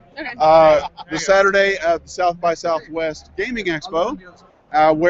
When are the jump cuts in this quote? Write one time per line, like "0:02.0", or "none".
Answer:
0:02.7